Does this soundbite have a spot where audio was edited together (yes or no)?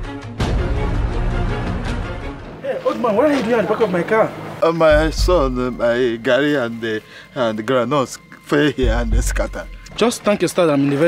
no